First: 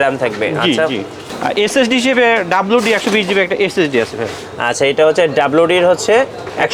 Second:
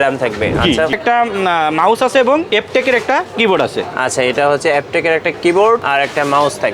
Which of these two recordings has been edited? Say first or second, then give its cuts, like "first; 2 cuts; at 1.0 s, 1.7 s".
second; 3 cuts; at 1.0 s, 2.5 s, 5.8 s